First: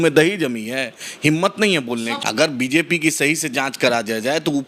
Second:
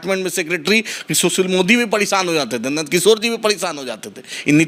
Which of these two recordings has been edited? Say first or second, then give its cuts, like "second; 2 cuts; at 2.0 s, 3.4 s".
first; 1 cut; at 2.2 s